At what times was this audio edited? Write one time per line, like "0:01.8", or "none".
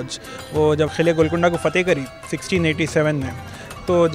0:00.9

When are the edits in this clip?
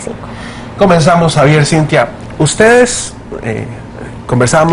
0:03.3

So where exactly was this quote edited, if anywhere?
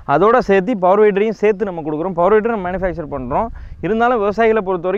none

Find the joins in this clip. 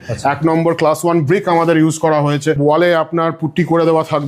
0:02.6

